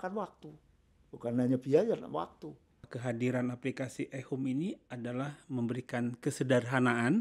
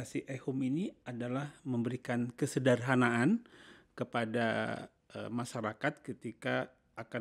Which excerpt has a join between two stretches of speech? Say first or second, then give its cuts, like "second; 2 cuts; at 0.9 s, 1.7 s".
first; 1 cut; at 2.9 s